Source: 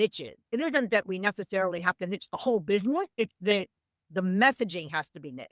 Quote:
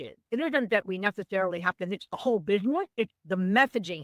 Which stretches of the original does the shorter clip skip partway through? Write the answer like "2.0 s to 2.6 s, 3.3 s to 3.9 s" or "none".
3.3 s to 4.0 s